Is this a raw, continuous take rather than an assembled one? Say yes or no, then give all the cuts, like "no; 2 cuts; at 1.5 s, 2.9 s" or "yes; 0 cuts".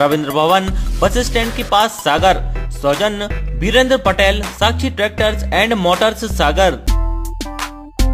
no; 1 cut; at 6.8 s